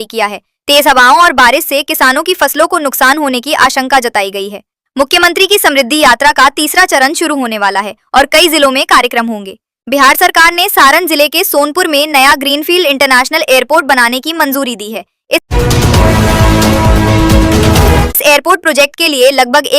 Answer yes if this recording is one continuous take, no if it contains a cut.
no